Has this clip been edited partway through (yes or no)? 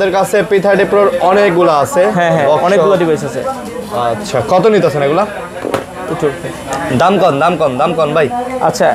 no